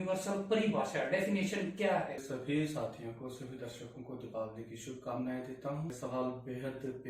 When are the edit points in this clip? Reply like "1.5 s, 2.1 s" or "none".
2.2 s, 6.0 s